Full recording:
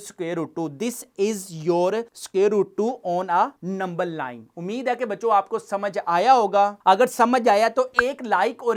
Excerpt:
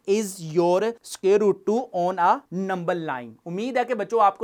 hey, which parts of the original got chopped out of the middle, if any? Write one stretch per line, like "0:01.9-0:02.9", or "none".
none